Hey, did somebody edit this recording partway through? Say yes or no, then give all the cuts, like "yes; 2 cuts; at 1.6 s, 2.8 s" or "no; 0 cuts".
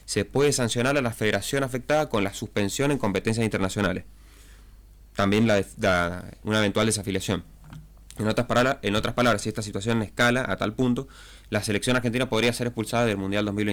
no; 0 cuts